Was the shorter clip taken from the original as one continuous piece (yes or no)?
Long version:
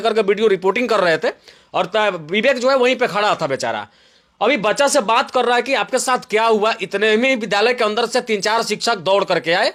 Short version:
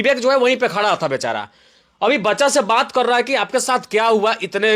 yes